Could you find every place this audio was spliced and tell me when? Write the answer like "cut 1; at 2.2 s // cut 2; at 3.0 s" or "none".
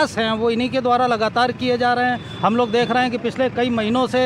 none